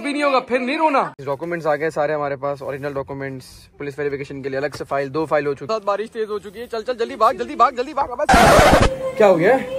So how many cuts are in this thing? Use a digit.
3